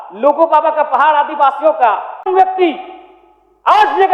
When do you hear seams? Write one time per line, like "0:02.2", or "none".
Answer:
0:02.3